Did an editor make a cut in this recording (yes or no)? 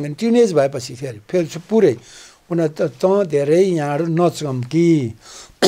no